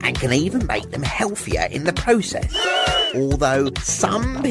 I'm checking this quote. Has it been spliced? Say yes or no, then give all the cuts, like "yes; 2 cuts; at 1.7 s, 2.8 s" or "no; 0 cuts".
no; 0 cuts